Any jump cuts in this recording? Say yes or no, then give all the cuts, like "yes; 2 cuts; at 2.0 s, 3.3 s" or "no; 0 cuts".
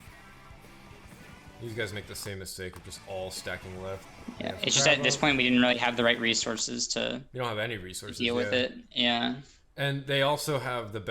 yes; 1 cut; at 4.1 s